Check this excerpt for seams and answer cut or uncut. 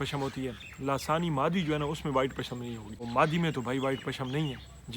cut